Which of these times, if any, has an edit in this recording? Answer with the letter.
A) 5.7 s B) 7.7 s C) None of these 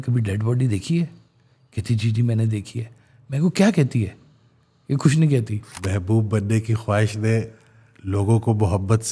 A